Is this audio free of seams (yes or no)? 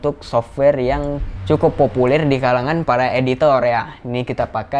yes